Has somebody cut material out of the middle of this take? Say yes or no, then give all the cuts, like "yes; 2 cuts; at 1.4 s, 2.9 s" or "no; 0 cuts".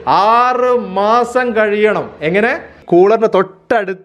yes; 1 cut; at 2.8 s